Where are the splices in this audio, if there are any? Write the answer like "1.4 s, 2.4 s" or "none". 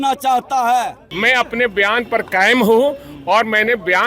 1.1 s